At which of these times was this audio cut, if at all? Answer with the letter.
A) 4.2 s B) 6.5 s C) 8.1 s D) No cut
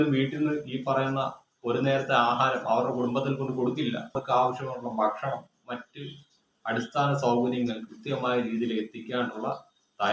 A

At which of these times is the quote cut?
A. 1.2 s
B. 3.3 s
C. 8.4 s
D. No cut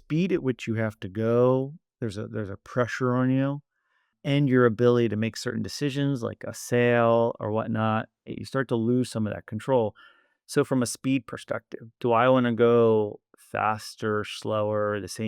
C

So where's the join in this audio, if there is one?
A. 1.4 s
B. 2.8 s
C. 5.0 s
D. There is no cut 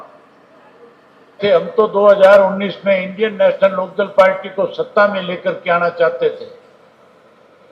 A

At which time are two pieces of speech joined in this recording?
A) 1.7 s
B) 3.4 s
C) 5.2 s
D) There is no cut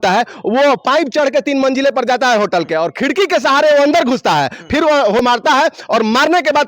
C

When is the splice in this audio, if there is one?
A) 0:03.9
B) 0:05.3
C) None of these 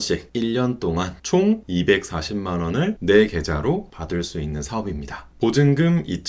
B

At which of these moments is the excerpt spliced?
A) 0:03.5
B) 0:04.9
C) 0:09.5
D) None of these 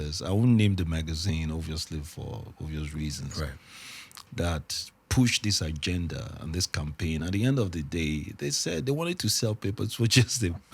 D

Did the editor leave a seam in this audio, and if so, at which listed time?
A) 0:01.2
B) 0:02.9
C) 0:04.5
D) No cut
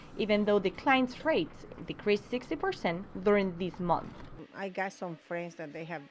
C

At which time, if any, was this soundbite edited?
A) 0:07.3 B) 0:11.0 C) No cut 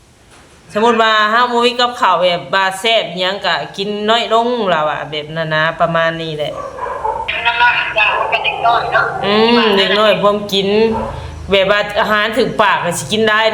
A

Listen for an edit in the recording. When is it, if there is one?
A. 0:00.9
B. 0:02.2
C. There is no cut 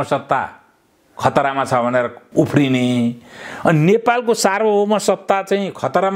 B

